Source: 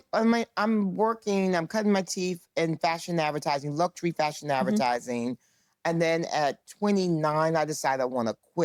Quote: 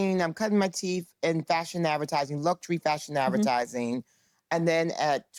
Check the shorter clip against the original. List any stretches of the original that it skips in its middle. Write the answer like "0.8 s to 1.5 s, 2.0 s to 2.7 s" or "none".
none